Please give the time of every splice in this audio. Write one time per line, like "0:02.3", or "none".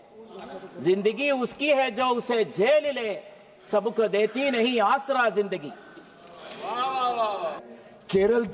0:07.6

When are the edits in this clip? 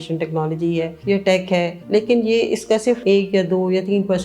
0:01.0
0:01.8
0:03.0

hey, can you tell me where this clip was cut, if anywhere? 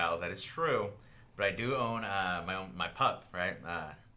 none

